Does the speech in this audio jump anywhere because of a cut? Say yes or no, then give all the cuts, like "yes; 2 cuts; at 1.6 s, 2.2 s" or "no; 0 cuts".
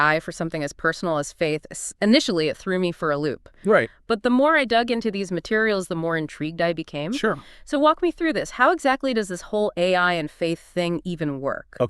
no; 0 cuts